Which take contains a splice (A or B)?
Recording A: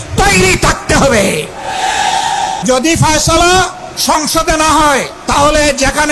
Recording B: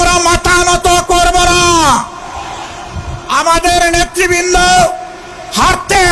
A